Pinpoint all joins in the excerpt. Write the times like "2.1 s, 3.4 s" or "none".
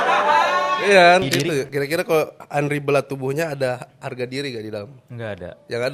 1.3 s